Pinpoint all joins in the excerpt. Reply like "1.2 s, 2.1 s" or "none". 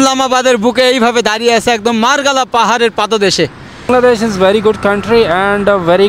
3.9 s